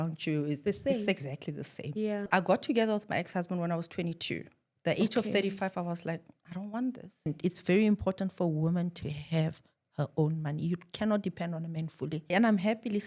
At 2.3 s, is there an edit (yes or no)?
yes